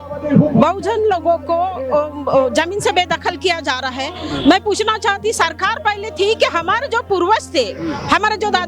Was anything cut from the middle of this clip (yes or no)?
no